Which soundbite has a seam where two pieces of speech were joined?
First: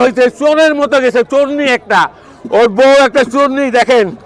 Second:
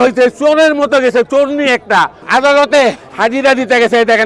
second; 2 cuts; at 2.2 s, 3.1 s

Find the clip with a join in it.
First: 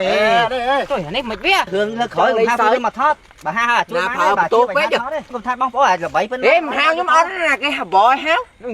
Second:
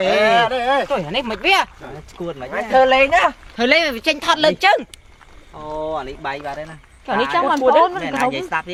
first; 2 cuts; at 1.7 s, 5.3 s

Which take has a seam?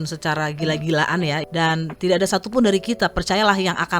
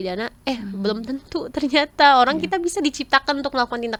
first; 1 cut; at 1.4 s

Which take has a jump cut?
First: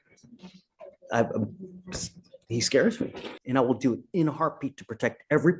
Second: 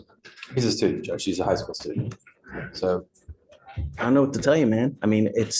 first; 1 cut; at 3.3 s

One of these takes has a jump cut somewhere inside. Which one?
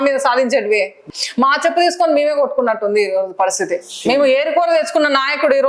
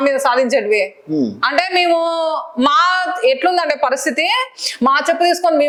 first; 1 cut; at 1.0 s

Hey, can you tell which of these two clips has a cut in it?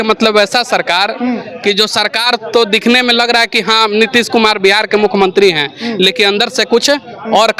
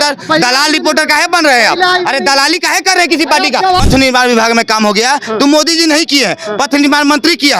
second; 1 cut; at 3.8 s

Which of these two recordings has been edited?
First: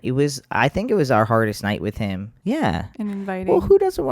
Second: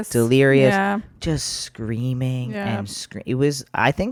first; 1 cut; at 2.3 s

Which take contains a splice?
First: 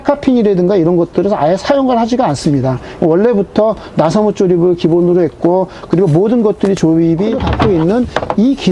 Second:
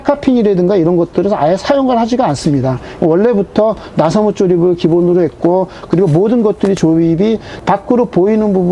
first; 1 cut; at 7.4 s

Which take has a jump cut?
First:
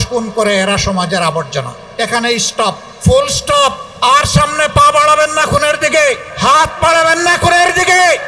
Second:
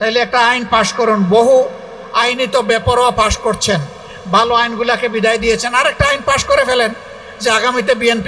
first; 4 cuts; at 1.8 s, 2.9 s, 3.9 s, 6.3 s

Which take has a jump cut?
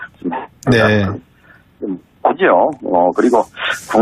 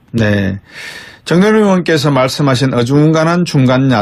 first; 1 cut; at 2.7 s

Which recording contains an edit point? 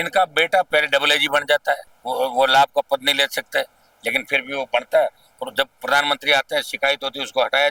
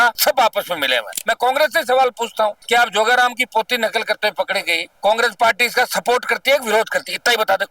second; 1 cut; at 1.2 s

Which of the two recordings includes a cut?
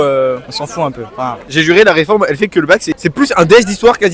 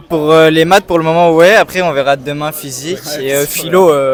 first; 2 cuts; at 1.5 s, 2.9 s

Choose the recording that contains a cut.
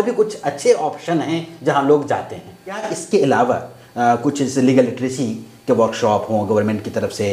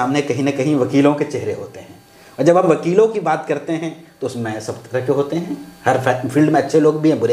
first; 1 cut; at 2.9 s

